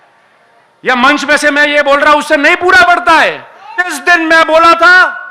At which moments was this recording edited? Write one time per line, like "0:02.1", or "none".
0:04.0